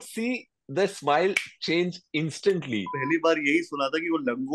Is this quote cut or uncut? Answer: cut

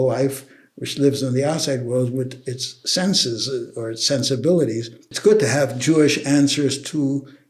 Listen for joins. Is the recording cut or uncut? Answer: cut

